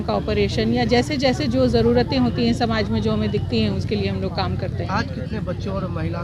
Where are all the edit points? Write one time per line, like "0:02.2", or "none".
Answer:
none